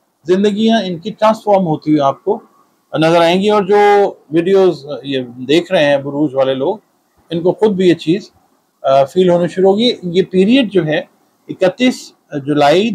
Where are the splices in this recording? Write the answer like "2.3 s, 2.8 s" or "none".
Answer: none